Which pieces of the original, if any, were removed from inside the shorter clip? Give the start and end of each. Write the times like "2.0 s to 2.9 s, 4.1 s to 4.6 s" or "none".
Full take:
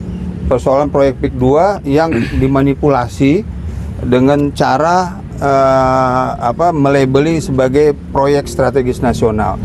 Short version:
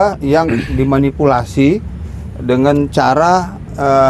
none